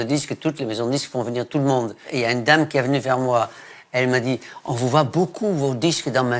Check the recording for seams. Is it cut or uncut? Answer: cut